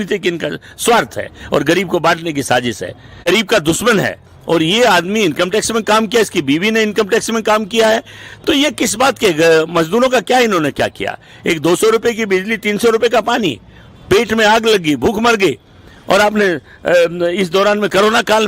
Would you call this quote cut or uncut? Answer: cut